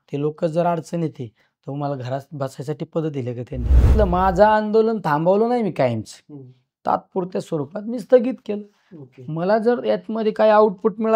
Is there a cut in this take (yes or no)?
yes